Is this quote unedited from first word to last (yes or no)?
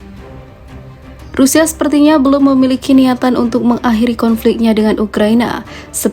no